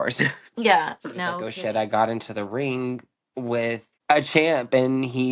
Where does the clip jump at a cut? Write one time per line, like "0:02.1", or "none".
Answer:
0:01.5
0:03.9

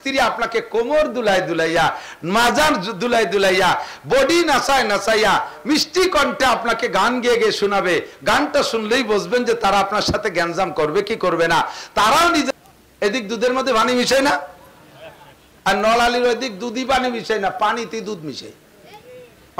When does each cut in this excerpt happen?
0:12.5

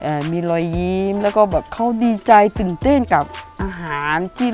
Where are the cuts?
0:01.7

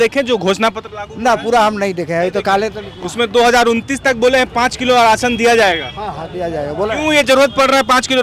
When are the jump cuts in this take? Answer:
none

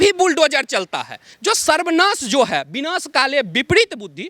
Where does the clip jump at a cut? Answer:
0:01.3

